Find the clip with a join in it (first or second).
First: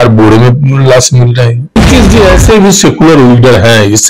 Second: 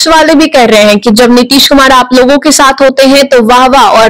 first